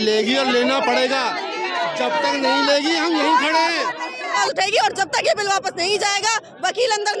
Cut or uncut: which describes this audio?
cut